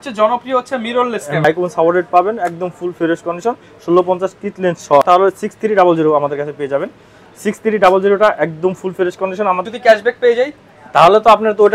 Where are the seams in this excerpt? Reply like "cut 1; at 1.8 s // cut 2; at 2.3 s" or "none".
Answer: cut 1; at 1.4 s // cut 2; at 5.0 s // cut 3; at 9.6 s